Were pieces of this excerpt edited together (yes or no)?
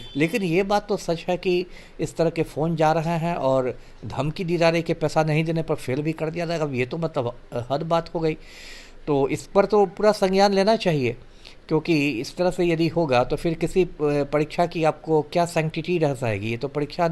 no